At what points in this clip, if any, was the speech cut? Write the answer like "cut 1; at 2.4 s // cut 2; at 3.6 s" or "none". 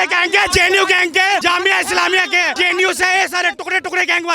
cut 1; at 1.4 s // cut 2; at 2.5 s